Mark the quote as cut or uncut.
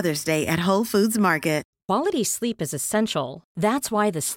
cut